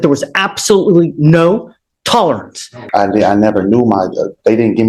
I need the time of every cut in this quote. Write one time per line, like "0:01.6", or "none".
0:02.8